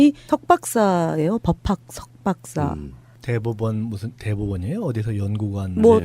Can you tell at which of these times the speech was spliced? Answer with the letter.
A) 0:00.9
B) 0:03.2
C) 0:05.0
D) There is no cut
A